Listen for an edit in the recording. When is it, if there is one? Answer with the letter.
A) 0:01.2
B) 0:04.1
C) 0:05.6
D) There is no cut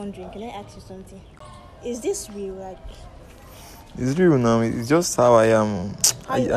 A